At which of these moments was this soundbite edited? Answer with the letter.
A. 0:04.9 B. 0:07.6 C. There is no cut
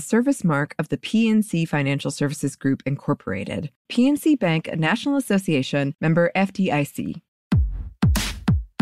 B